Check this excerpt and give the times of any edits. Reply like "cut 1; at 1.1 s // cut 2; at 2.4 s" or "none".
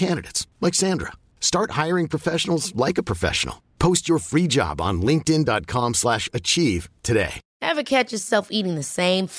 cut 1; at 7.4 s